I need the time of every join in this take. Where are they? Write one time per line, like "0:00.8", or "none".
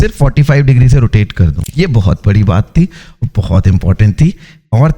0:01.6